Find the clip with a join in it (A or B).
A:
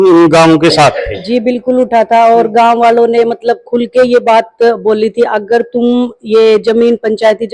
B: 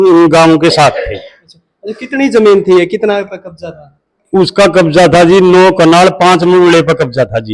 A